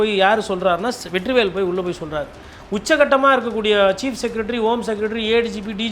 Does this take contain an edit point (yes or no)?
yes